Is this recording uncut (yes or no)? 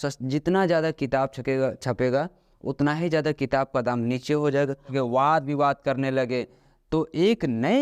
no